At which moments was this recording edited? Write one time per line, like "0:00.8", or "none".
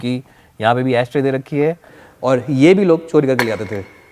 0:02.0